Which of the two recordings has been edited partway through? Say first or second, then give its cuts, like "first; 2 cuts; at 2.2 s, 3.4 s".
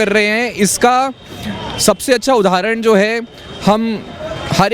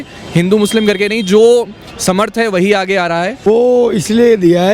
second; 1 cut; at 3.5 s